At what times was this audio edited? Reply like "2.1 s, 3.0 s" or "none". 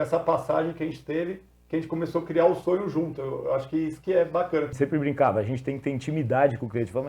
4.7 s